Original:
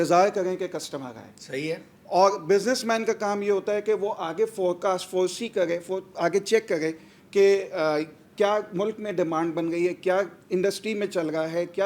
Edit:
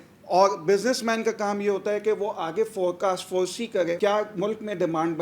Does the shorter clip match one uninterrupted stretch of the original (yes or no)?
no